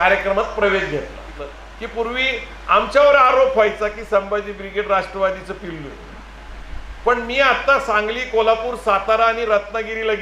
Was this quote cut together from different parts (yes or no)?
yes